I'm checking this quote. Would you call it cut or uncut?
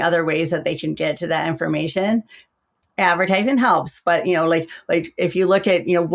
uncut